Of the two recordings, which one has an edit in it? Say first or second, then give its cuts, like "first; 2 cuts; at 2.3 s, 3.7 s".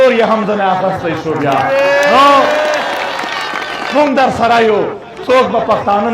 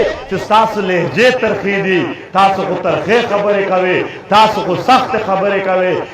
first; 2 cuts; at 3.7 s, 5.1 s